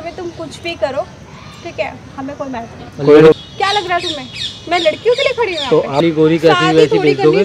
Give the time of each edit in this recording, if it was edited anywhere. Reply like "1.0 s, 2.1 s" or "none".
3.4 s, 6.0 s